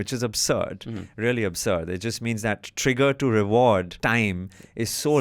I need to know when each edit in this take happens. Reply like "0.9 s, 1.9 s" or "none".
3.9 s